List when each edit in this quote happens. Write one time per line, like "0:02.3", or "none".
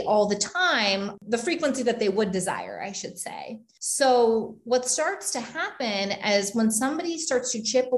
0:01.1